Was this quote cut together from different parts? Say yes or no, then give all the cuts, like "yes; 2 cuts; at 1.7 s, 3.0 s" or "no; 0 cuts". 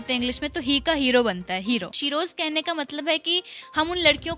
yes; 1 cut; at 2.0 s